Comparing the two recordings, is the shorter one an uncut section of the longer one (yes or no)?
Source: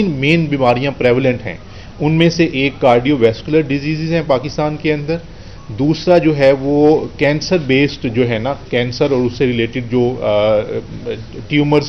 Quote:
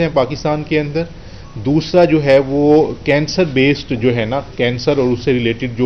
yes